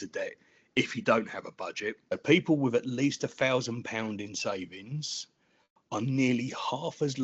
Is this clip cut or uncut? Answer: cut